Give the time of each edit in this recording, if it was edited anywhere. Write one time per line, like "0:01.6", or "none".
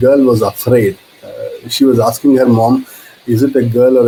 none